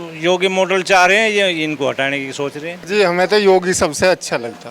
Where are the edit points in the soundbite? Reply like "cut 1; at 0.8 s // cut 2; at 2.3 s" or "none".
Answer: cut 1; at 2.8 s